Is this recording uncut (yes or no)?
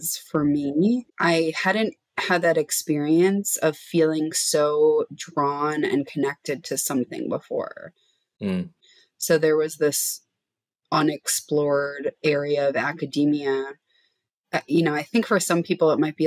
no